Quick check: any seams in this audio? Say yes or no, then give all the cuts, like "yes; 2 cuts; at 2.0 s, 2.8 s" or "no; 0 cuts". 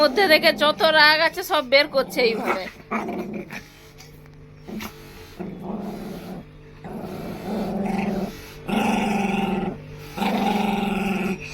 no; 0 cuts